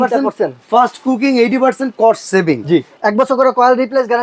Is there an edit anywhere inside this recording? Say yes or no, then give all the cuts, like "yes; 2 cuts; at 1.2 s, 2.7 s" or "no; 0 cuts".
yes; 1 cut; at 2.9 s